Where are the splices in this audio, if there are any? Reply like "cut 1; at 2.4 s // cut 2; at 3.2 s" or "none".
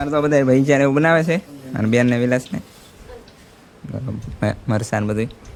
none